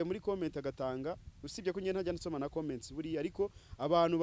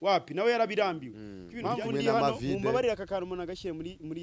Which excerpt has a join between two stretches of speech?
second; 1 cut; at 1.4 s

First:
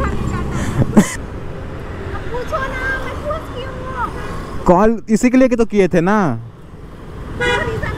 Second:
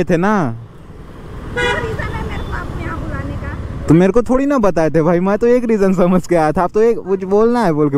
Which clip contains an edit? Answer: first; 1 cut; at 1.2 s

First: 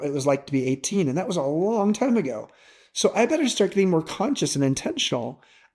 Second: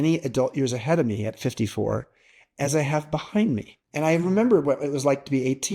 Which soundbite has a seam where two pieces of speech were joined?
second; 1 cut; at 3.8 s

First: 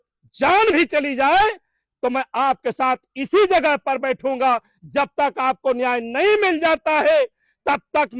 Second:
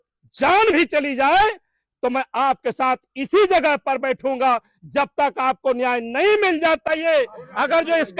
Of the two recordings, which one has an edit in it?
second; 1 cut; at 6.8 s

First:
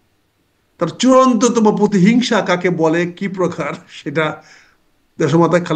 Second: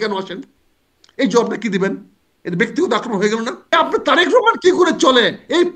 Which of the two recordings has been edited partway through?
second; 1 cut; at 3.7 s

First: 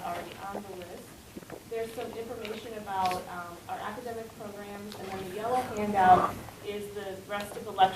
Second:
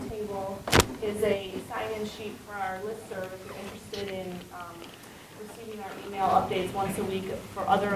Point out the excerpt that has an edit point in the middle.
first; 1 cut; at 5.8 s

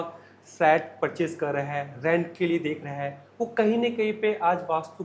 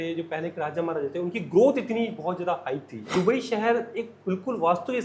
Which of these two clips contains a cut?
second; 1 cut; at 3.0 s

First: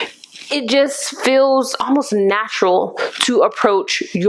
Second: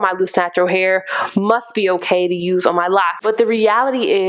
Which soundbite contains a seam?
second; 1 cut; at 3.1 s

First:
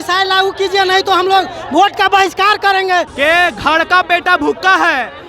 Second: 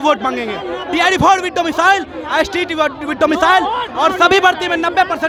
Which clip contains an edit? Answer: first; 1 cut; at 3.1 s

